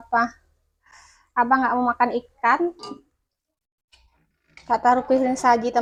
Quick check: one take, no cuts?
yes; 0 cuts

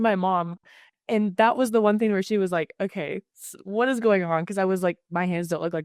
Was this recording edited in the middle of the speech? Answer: no; 0 cuts

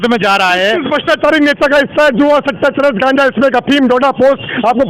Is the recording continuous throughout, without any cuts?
yes; 0 cuts

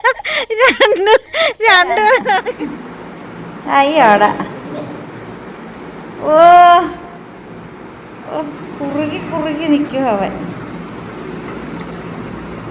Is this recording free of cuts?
no; 1 cut; at 2.5 s

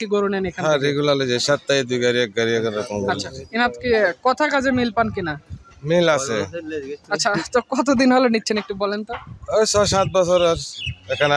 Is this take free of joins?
yes; 0 cuts

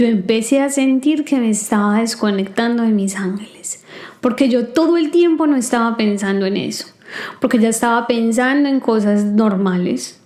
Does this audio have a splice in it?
no; 0 cuts

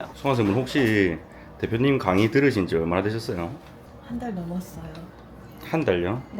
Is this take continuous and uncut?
yes; 0 cuts

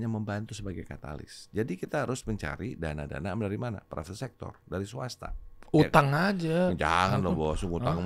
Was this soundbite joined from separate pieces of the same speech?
no; 0 cuts

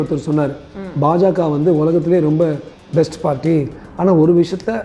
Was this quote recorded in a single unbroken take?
yes; 0 cuts

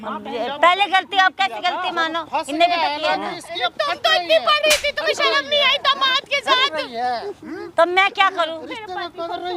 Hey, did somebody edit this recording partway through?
no; 0 cuts

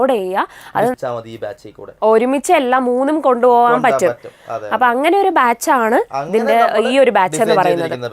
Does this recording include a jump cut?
yes; 1 cut; at 1.0 s

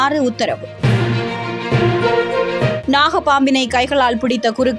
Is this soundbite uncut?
yes; 0 cuts

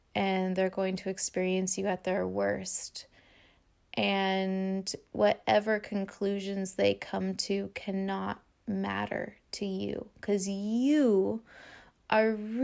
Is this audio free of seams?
yes; 0 cuts

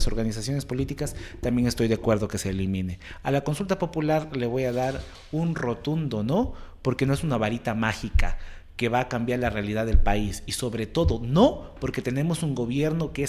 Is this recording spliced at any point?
no; 0 cuts

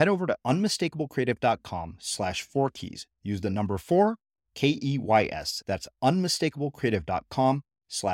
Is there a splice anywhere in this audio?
no; 0 cuts

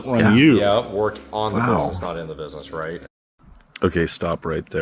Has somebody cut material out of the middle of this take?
no; 0 cuts

